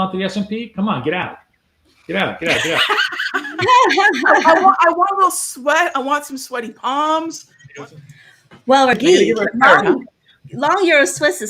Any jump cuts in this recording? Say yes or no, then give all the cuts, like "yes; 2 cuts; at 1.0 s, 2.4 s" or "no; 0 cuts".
yes; 1 cut; at 7.5 s